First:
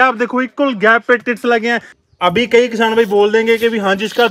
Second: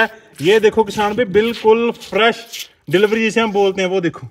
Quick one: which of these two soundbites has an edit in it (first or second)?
first